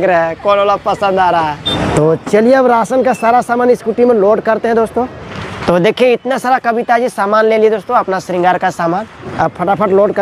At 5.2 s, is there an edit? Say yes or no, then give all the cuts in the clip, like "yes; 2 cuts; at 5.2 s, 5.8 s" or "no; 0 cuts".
yes; 3 cuts; at 1.6 s, 5.2 s, 9.2 s